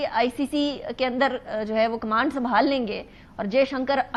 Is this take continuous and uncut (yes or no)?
yes